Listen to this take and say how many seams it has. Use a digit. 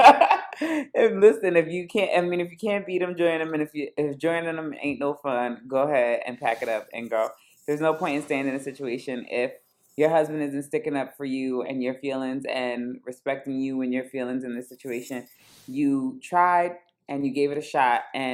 0